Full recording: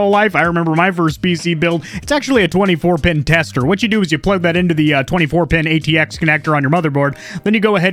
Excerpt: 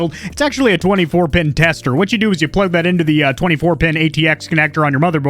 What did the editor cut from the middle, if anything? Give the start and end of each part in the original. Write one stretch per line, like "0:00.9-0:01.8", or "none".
none

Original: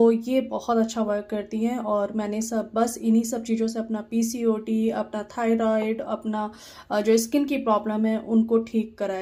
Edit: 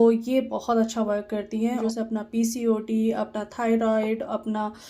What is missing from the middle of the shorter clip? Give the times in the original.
0:01.8-0:03.6

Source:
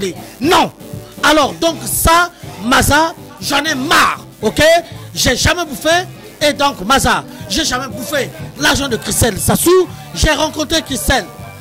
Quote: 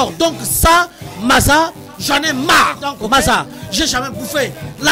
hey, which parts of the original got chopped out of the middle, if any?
0:04.3-0:06.7

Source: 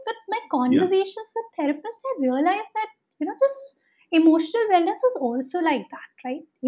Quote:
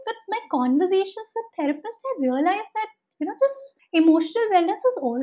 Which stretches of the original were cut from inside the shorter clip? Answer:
0:03.7-0:03.9

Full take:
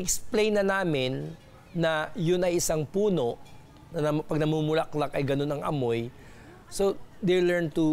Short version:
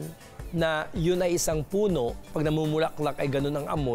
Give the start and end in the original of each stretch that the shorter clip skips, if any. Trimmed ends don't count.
0:03.5-0:04.3

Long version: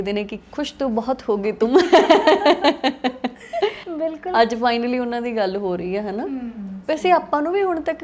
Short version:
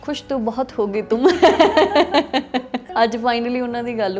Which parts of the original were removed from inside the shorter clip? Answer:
0:03.4-0:04.3

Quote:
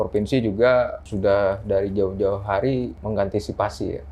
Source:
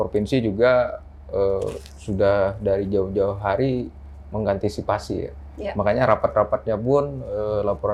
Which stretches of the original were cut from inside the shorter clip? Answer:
0:01.0-0:02.0
0:03.9-0:04.3

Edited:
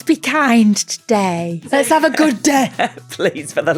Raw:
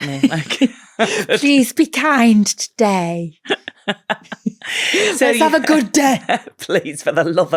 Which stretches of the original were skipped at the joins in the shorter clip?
0:03.4-0:05.2

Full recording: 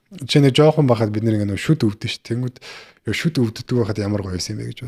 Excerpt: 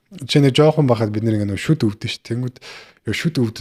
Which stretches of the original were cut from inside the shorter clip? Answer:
none

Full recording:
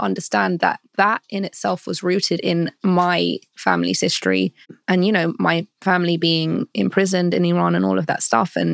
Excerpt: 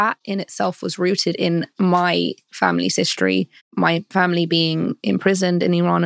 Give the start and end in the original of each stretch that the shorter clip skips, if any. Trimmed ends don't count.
0:04.9-0:05.5

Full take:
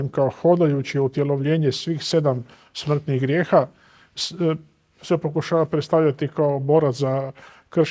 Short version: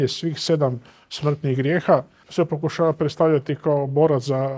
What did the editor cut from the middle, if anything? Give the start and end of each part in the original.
0:03.8-0:04.9

